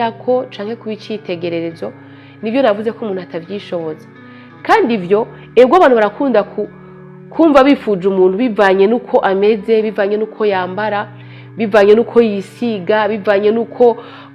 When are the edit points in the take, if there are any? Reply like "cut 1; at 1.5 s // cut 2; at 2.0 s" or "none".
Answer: none